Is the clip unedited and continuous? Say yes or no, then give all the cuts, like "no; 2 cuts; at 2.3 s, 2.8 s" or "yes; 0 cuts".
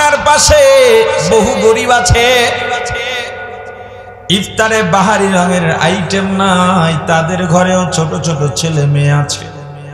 yes; 0 cuts